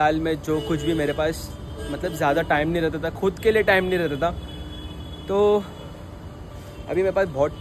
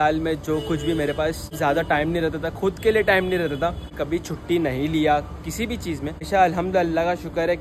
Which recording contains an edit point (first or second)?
second